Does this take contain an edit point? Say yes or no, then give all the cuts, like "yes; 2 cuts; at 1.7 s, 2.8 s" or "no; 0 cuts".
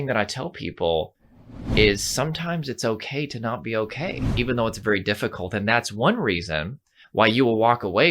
yes; 1 cut; at 4.2 s